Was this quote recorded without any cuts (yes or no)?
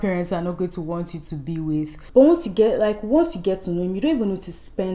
no